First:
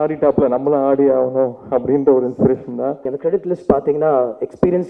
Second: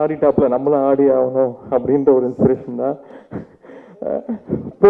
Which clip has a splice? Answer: first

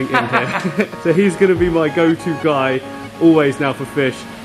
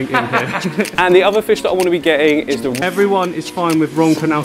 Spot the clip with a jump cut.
second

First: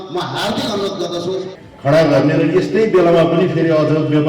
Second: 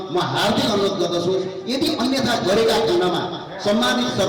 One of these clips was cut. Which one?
first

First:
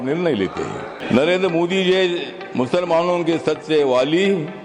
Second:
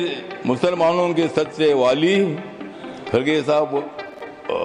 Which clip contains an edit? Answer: first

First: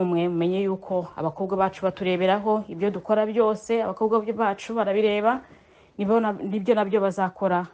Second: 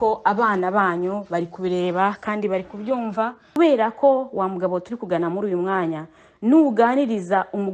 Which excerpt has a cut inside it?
second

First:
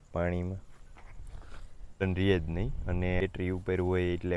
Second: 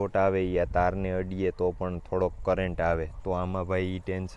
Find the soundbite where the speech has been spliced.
first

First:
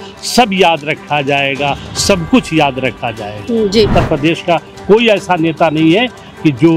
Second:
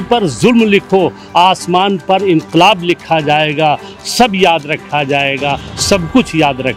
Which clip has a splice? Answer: first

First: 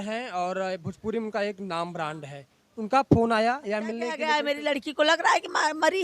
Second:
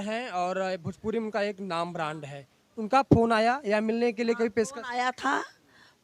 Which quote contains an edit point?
first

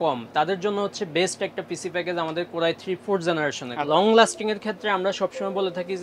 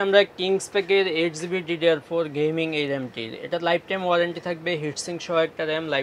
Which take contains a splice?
first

